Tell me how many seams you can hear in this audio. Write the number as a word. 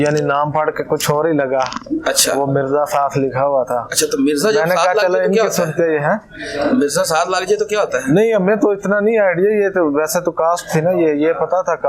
zero